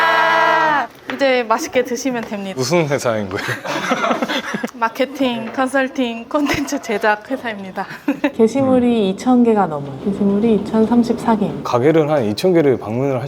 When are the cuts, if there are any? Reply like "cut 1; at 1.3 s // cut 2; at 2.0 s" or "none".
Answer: cut 1; at 8.3 s